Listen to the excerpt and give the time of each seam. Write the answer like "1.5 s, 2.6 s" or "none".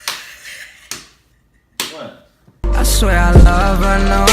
2.7 s